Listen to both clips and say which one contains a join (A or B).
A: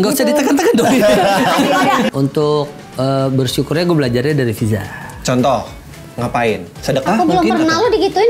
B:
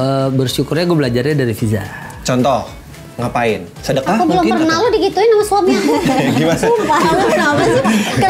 A